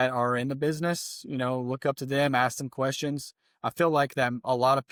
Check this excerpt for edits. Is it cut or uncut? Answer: uncut